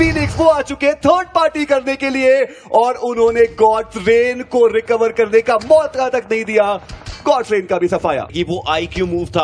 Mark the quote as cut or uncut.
uncut